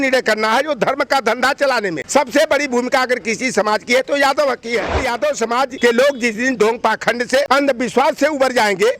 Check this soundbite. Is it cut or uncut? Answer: cut